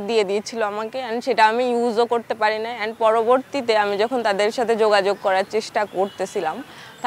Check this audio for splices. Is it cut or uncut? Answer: uncut